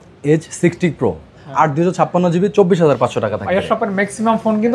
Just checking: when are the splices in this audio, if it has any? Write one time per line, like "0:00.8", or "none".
0:01.4

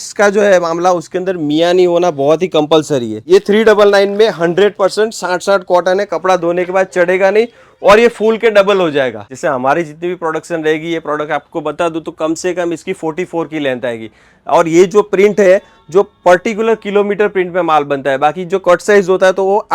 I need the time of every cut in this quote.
0:03.2
0:09.2

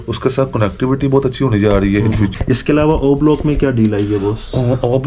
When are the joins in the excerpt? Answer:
0:02.3

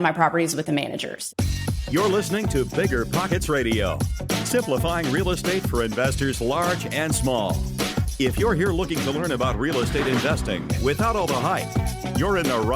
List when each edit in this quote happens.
0:01.1

